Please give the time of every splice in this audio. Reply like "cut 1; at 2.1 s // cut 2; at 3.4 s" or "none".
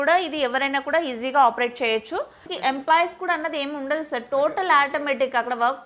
cut 1; at 2.5 s